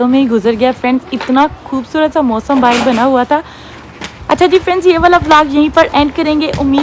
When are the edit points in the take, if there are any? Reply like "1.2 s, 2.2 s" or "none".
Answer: none